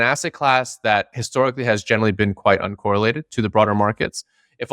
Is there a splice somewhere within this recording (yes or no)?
yes